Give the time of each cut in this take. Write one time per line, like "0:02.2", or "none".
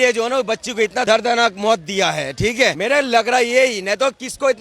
0:01.1
0:02.8